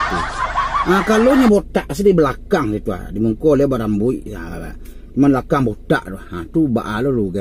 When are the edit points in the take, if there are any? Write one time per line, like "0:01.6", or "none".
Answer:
none